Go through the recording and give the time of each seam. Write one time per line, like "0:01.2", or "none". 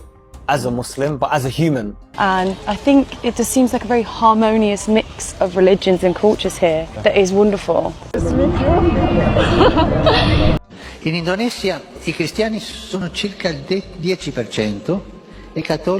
0:02.1
0:10.6